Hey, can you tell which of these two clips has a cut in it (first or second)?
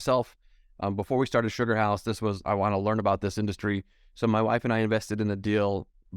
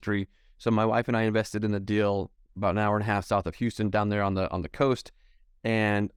first